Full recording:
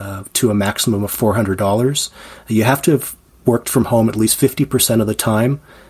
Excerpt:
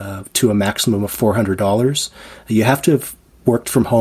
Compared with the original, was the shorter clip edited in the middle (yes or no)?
no